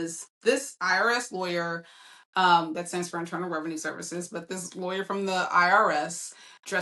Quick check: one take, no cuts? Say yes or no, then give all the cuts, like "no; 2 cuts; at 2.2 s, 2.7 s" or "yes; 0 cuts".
yes; 0 cuts